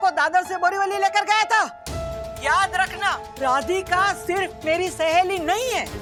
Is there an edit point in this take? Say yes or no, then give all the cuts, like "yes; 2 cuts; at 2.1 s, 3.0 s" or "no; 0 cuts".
no; 0 cuts